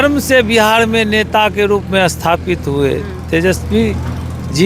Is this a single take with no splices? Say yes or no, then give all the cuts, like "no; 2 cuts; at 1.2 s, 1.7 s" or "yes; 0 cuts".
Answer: yes; 0 cuts